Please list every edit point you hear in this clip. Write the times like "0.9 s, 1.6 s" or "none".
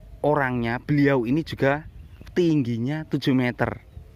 none